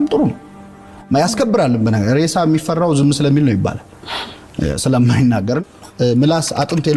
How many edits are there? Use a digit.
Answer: 1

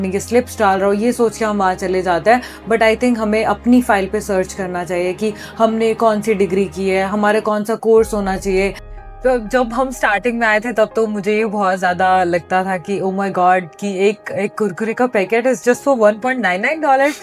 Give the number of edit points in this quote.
1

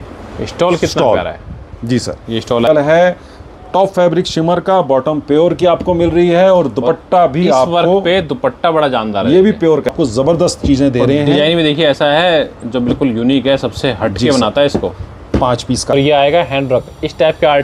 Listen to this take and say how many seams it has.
3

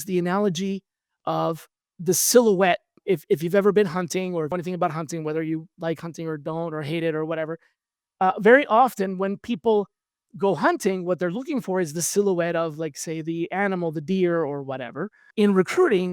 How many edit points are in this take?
3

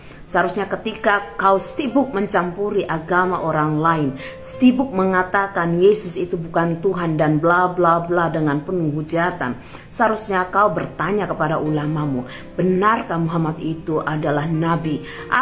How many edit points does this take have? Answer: 0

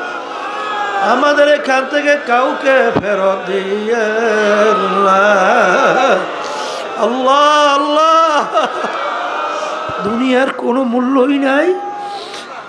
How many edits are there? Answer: 1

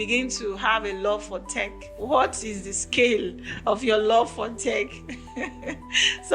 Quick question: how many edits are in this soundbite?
1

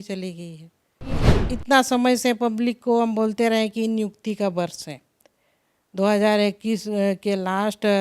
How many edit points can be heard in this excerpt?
1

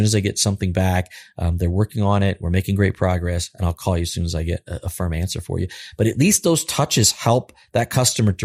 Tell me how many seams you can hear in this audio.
0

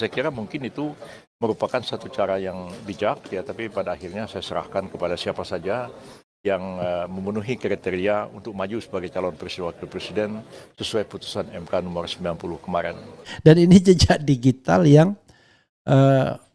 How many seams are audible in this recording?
1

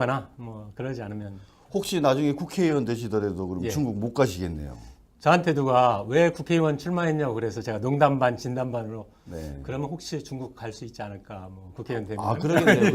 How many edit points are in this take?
1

